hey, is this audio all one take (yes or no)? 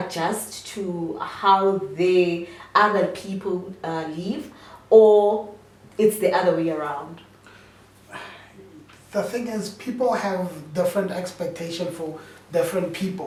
yes